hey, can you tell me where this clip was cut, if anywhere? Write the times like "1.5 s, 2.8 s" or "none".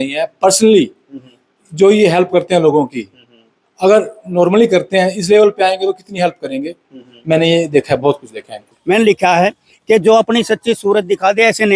8.7 s